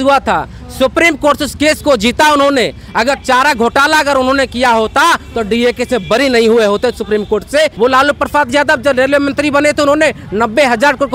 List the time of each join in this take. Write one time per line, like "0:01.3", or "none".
0:07.7